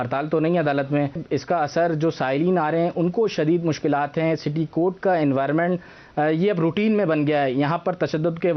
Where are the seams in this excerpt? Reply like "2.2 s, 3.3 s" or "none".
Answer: 1.2 s